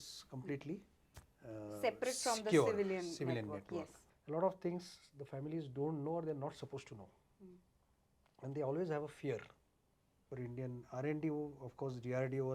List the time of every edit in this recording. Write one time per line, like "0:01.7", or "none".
0:04.0
0:10.2